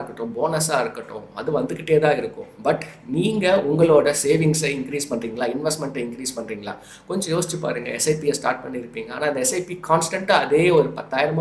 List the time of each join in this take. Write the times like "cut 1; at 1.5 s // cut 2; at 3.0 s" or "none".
none

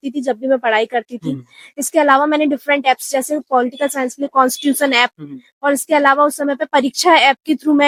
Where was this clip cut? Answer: none

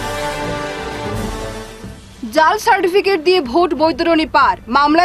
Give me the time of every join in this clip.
cut 1; at 1.0 s

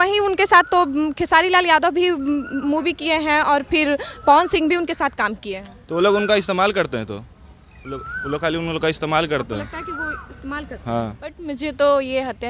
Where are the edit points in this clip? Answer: cut 1; at 11.4 s

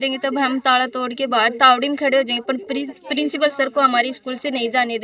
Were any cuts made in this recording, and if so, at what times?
none

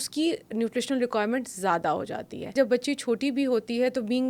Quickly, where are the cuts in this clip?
cut 1; at 2.5 s

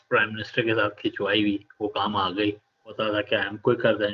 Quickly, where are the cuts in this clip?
cut 1; at 3.0 s

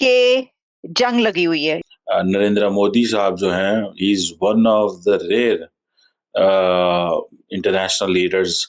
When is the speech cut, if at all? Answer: cut 1; at 1.8 s

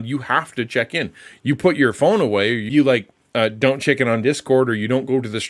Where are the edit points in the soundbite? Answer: cut 1; at 2.6 s

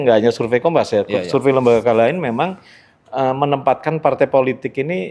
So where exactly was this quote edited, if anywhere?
none

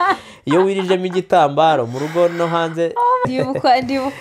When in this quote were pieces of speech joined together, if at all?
cut 1; at 3.2 s

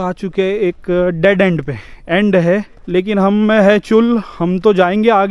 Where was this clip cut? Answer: cut 1; at 2.8 s

